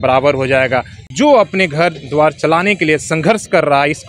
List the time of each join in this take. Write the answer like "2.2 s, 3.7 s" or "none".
1.0 s